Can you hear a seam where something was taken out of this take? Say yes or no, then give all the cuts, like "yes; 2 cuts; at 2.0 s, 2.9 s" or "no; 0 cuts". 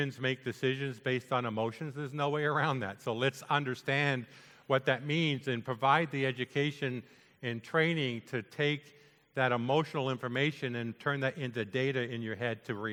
no; 0 cuts